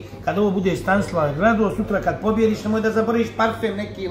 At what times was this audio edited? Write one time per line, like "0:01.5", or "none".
none